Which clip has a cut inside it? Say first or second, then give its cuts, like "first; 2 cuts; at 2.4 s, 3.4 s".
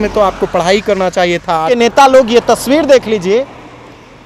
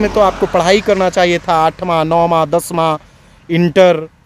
first; 1 cut; at 1.7 s